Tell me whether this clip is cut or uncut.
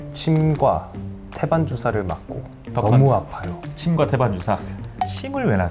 cut